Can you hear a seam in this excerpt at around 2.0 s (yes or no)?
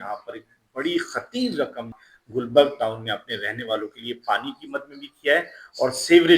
yes